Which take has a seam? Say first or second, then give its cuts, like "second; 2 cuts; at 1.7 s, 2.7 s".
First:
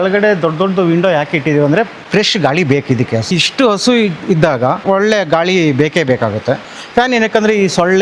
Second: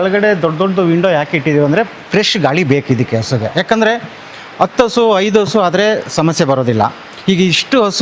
first; 3 cuts; at 3.3 s, 4.8 s, 6.7 s